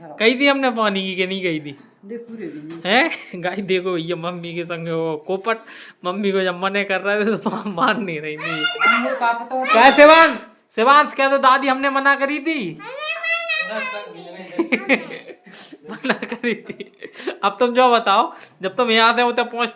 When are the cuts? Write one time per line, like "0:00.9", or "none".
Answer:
none